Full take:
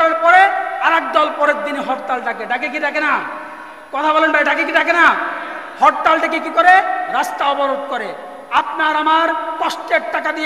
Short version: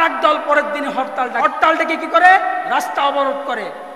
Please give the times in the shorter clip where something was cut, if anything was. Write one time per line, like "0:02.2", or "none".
0:01.5